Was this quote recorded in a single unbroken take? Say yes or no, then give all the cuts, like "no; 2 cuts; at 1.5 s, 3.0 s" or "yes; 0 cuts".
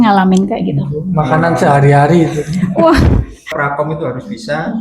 no; 1 cut; at 3.5 s